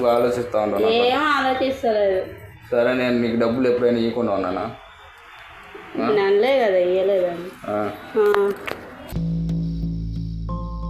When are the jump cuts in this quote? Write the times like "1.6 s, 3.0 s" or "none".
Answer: none